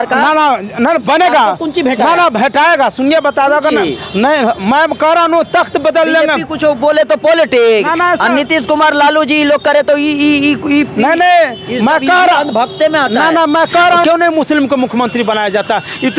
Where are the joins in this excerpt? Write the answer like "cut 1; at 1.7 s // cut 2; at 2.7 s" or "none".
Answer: cut 1; at 14.0 s